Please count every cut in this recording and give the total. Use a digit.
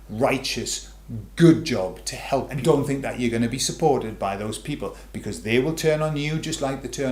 1